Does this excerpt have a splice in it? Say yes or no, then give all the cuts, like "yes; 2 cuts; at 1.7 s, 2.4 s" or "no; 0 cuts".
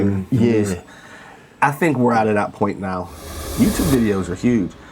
yes; 1 cut; at 3.4 s